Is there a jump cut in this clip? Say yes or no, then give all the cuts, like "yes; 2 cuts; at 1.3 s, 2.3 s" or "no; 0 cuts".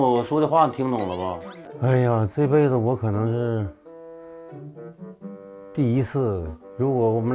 yes; 1 cut; at 1.6 s